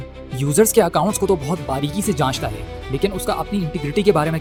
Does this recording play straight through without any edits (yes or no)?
yes